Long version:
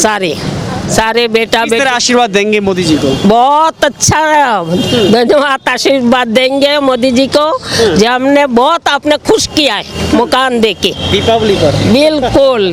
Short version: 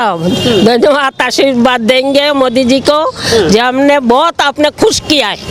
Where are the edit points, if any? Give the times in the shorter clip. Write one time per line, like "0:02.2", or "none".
none

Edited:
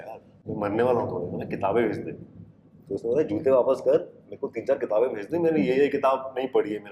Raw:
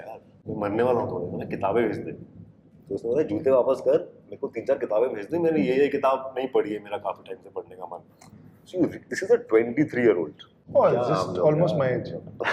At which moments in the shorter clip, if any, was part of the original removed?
none

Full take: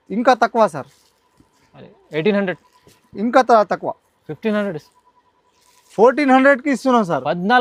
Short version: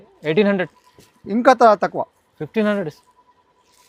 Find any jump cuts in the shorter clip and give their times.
none

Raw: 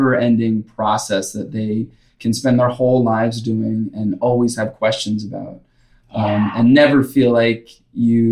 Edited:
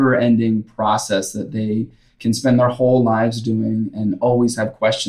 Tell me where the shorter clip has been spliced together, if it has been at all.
none

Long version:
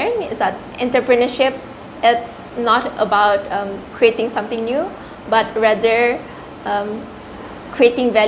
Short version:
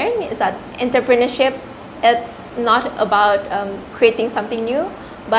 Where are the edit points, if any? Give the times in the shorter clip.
none

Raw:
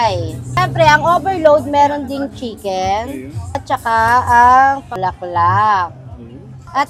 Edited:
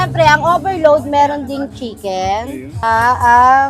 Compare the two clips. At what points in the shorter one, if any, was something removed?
0:02.8

